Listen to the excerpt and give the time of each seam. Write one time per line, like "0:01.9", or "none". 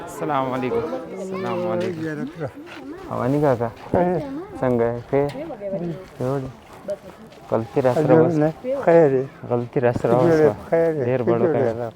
0:01.1